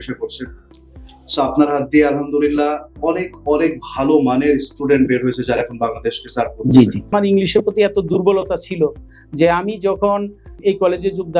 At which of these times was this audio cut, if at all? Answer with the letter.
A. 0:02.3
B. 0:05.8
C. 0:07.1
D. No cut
C